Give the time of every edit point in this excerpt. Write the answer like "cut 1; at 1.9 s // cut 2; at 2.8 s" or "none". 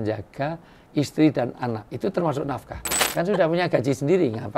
cut 1; at 3.1 s